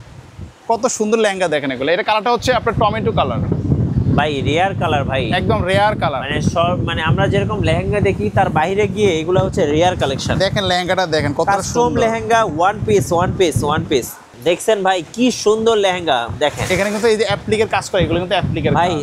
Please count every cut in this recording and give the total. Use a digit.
1